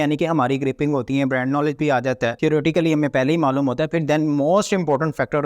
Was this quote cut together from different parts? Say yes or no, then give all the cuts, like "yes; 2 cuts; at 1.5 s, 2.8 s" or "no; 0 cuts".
yes; 1 cut; at 2.4 s